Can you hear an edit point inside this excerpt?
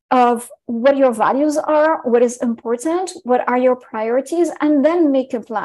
no; 0 cuts

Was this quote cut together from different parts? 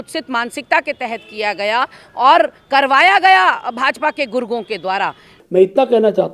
yes; 1 cut; at 5.3 s

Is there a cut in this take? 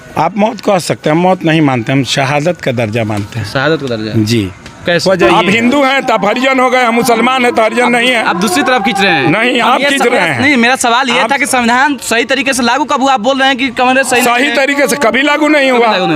yes; 1 cut; at 5.3 s

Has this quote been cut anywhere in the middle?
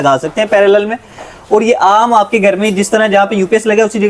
no; 0 cuts

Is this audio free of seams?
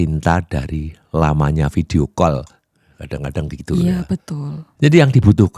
no; 1 cut; at 4.6 s

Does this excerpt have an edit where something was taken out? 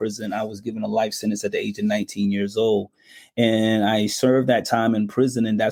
no; 0 cuts

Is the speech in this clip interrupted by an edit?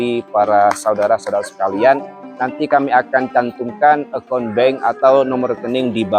no; 0 cuts

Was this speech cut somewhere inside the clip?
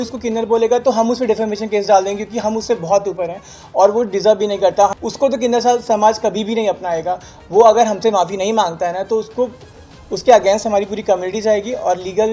yes; 1 cut; at 4.9 s

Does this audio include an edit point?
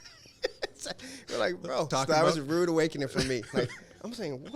yes; 1 cut; at 1.9 s

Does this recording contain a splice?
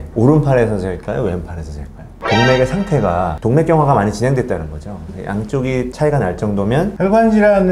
yes; 2 cuts; at 2.2 s, 6.9 s

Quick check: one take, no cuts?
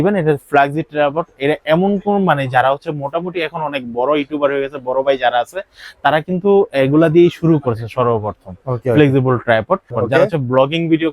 no; 1 cut; at 9.9 s

